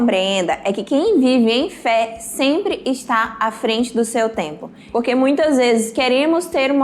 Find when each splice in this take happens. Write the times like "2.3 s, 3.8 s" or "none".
4.9 s